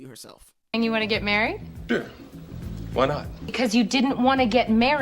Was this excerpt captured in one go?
no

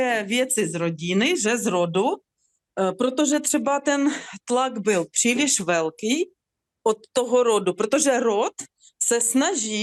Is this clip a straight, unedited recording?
yes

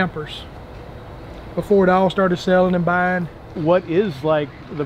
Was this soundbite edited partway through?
yes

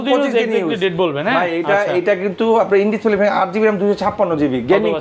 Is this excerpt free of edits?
yes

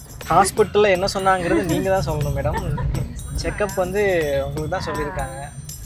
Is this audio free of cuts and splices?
yes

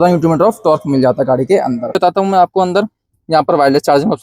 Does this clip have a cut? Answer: yes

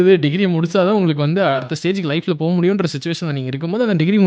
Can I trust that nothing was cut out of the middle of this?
no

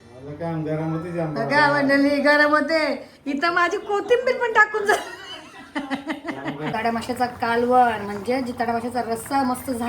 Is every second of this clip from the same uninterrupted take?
no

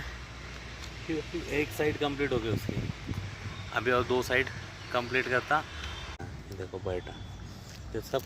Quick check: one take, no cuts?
no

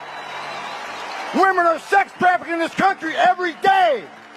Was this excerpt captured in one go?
yes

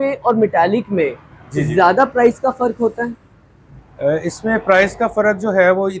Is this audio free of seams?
yes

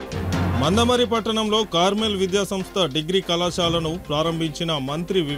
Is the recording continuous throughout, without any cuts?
yes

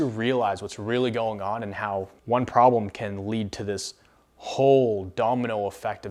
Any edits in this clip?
no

